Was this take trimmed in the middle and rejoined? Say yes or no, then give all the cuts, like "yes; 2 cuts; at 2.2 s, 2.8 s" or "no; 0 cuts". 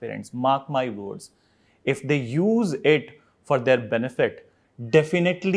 no; 0 cuts